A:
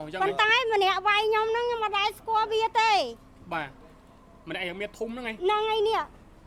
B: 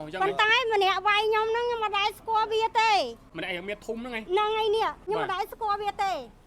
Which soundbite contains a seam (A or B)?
B